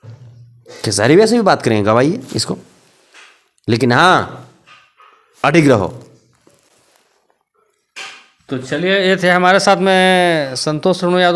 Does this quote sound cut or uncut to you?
uncut